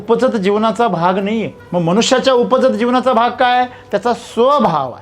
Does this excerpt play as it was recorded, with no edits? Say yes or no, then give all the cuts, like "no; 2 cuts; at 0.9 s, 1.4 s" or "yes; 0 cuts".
no; 1 cut; at 1.6 s